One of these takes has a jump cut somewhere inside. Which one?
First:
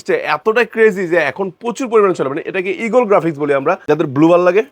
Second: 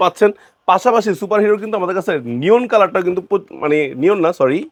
first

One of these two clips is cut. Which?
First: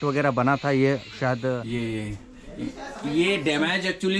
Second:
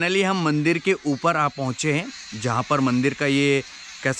first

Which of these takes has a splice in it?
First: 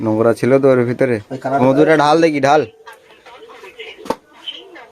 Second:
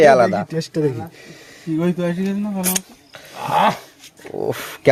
first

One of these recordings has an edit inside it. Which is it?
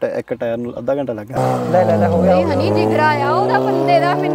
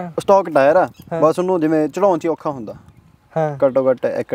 first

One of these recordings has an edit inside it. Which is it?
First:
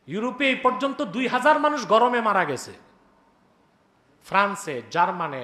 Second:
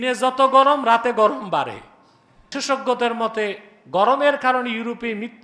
second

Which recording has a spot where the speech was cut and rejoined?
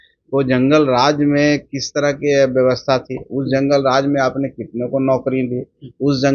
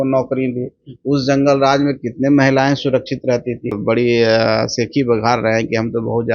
second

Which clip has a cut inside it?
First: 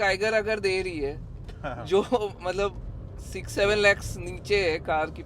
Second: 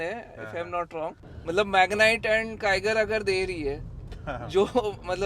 second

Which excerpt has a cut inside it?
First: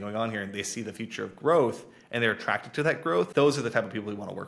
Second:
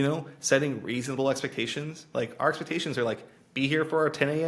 first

